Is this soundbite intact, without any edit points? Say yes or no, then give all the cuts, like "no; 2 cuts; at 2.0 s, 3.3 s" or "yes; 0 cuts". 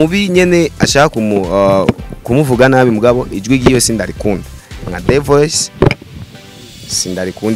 yes; 0 cuts